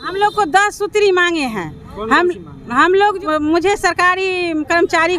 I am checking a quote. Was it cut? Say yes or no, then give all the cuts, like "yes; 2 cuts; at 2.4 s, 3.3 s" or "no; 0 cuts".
yes; 1 cut; at 3.2 s